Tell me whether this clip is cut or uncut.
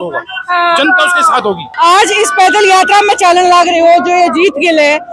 cut